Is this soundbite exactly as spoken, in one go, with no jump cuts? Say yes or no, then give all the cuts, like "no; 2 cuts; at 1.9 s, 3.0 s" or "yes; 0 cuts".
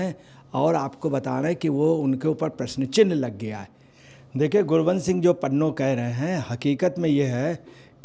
no; 1 cut; at 3.9 s